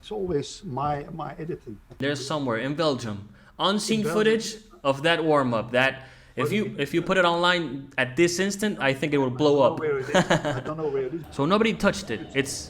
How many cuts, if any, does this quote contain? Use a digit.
2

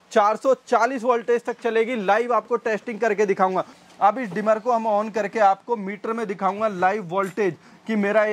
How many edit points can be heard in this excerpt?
1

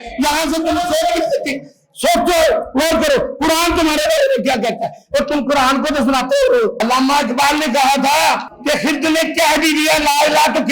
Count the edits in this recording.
2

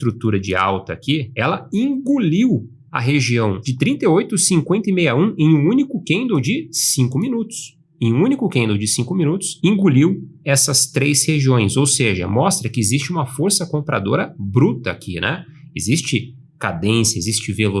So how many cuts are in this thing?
2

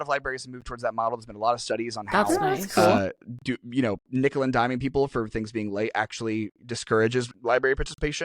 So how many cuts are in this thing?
1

